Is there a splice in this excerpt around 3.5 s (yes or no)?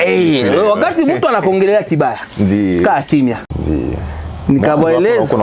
yes